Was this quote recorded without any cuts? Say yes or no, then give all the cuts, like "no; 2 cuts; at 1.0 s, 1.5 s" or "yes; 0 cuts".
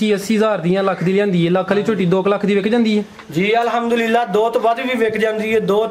yes; 0 cuts